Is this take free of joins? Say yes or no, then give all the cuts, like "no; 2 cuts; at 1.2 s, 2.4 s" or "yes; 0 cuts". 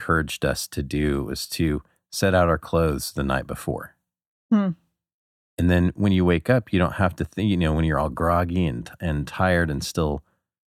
yes; 0 cuts